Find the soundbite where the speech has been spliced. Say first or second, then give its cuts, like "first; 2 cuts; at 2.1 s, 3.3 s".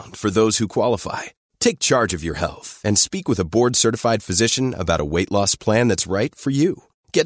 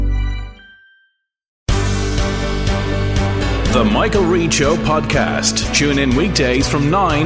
second; 1 cut; at 1.6 s